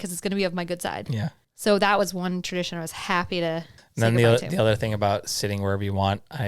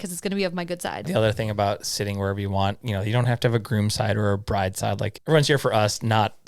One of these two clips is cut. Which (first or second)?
second